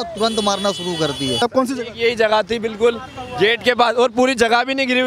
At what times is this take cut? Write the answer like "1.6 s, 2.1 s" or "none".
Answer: 1.4 s